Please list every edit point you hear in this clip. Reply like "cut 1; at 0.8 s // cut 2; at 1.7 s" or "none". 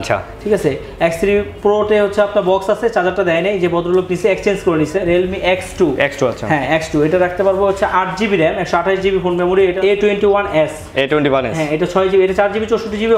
cut 1; at 5.0 s // cut 2; at 9.8 s